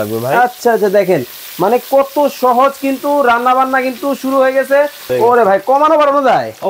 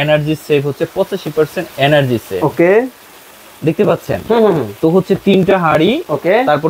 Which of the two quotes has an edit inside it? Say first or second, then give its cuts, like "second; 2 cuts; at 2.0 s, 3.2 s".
first; 1 cut; at 5.0 s